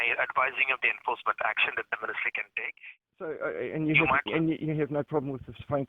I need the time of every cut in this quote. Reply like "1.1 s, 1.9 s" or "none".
3.3 s